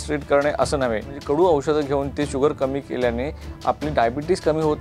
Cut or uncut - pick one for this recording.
cut